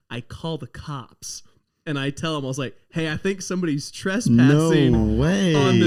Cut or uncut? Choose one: uncut